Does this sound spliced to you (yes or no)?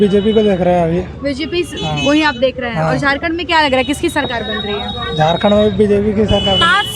no